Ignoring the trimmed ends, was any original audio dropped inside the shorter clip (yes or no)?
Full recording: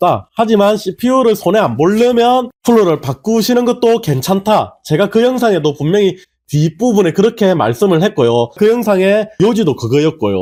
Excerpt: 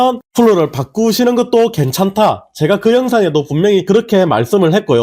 yes